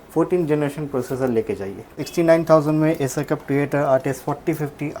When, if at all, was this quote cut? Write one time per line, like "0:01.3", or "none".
0:01.9